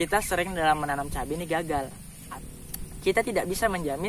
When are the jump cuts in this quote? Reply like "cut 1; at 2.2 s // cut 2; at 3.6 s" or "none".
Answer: cut 1; at 2.1 s